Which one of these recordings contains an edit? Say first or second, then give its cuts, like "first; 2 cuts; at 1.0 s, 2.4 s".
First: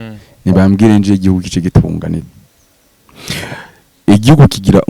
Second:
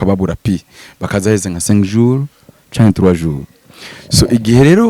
first; 1 cut; at 2.2 s